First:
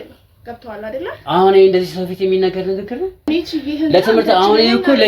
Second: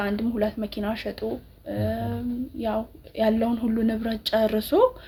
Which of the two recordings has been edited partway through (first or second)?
first